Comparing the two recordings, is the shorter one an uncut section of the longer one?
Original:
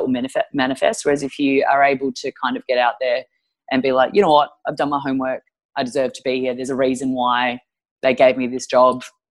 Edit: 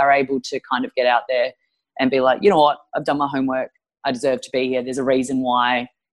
yes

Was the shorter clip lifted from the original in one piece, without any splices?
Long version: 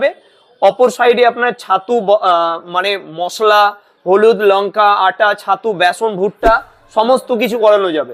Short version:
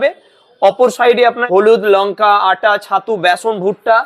no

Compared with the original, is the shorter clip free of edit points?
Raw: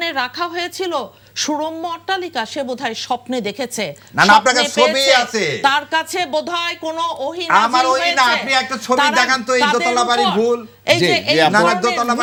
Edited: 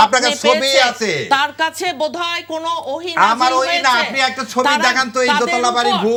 yes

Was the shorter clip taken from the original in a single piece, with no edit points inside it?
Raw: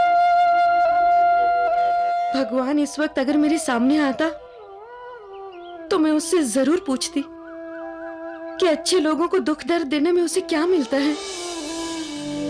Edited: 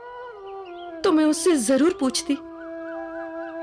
yes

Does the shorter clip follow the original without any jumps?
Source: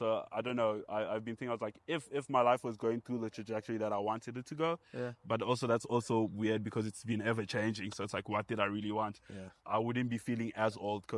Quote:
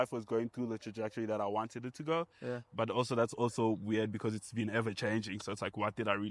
yes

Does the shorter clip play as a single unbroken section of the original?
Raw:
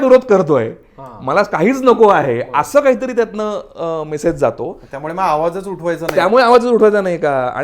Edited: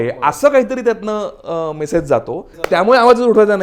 no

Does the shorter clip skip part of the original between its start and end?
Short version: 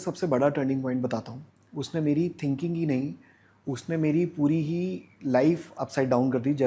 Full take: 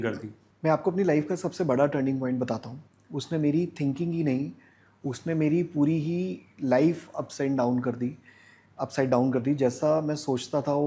yes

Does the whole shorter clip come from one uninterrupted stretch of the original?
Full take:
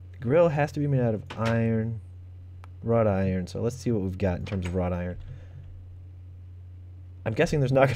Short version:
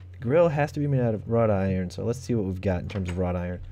no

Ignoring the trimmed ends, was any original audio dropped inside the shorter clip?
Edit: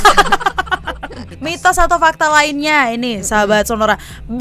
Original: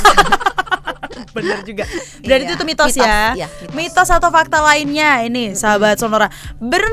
yes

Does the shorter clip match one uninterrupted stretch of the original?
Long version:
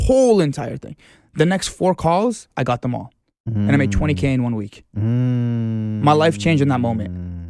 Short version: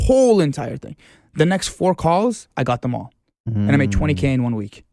yes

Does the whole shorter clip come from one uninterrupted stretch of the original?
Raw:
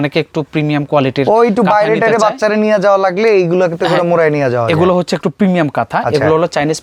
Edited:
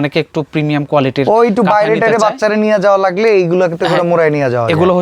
yes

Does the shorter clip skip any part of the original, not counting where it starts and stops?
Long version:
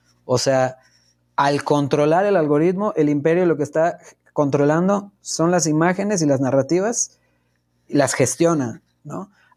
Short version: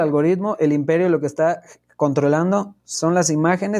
no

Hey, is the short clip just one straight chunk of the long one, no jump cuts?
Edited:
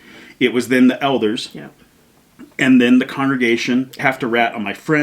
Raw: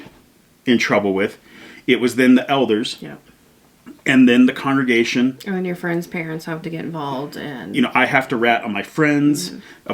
no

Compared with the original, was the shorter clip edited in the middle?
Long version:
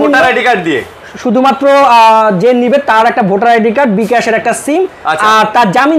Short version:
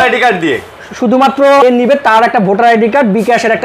yes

